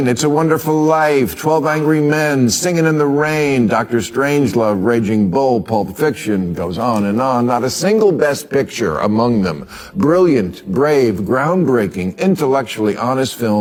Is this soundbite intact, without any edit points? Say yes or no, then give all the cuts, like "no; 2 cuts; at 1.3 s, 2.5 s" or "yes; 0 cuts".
yes; 0 cuts